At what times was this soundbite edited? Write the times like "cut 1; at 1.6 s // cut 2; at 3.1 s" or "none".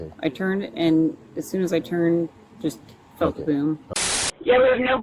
cut 1; at 3.9 s